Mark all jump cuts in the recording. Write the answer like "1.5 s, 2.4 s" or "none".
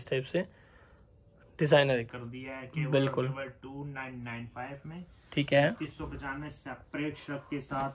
2.1 s